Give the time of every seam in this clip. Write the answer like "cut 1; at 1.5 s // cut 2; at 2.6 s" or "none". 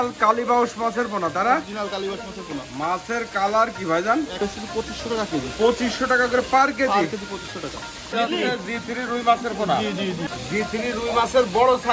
cut 1; at 4.4 s // cut 2; at 8.1 s // cut 3; at 10.3 s